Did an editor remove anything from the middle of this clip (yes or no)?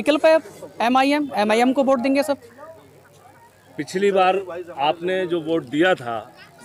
no